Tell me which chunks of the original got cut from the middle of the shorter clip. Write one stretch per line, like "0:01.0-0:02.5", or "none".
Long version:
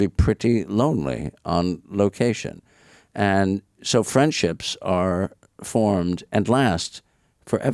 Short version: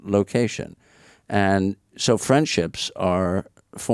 none